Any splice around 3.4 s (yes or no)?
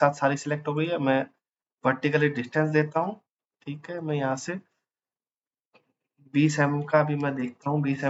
no